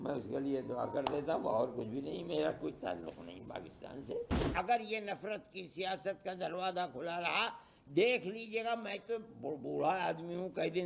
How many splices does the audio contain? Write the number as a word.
one